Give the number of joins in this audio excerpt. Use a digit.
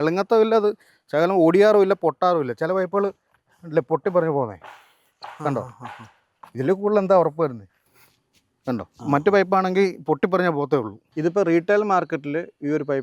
1